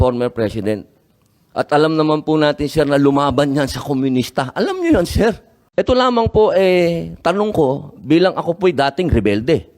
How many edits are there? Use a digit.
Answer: 1